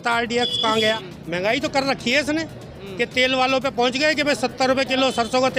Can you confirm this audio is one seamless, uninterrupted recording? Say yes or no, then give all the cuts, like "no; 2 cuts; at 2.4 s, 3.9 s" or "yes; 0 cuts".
no; 1 cut; at 1.0 s